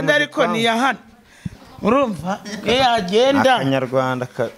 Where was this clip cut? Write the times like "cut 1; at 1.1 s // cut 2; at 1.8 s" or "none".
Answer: none